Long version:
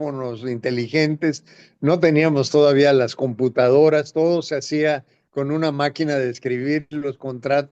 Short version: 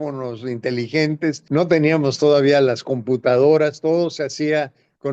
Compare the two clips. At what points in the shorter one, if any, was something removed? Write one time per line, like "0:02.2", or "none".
0:01.4